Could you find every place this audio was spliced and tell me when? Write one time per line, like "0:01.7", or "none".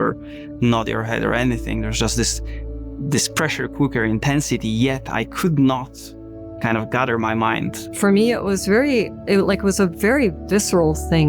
0:07.8